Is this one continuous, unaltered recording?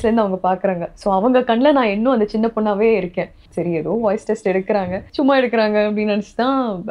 no; 2 cuts; at 3.4 s, 5.0 s

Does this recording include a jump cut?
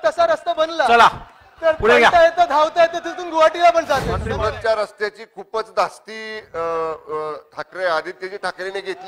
yes; 1 cut; at 4.2 s

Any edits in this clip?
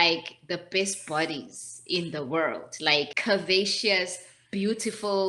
yes; 1 cut; at 3.2 s

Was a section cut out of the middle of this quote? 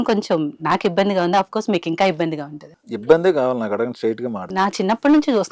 yes; 1 cut; at 3.1 s

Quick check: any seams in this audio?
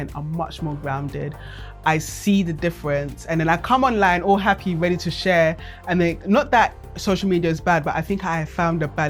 no; 0 cuts

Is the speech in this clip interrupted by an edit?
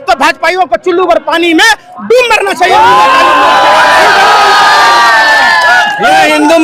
no; 0 cuts

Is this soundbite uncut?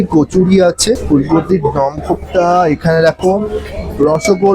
no; 1 cut; at 1.0 s

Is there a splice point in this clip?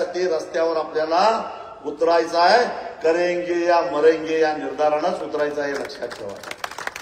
no; 0 cuts

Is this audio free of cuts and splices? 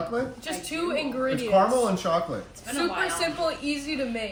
yes; 0 cuts

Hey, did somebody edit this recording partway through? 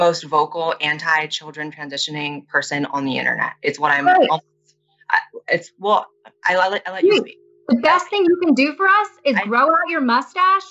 no; 0 cuts

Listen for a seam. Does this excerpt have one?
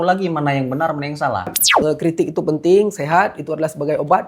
yes; 1 cut; at 1.6 s

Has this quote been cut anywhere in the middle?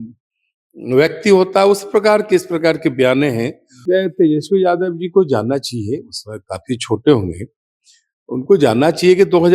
yes; 1 cut; at 3.7 s

